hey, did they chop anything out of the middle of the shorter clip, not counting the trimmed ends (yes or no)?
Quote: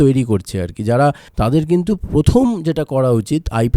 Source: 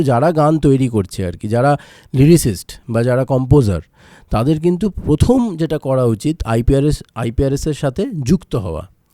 yes